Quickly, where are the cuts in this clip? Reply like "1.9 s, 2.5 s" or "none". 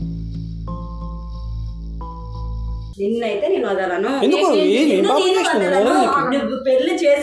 2.9 s